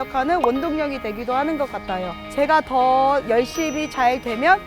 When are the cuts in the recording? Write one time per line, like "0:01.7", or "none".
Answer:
0:02.2